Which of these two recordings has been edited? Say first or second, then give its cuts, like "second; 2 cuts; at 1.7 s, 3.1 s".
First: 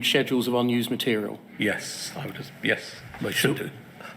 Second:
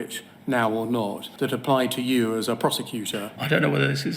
second; 2 cuts; at 1.2 s, 3.3 s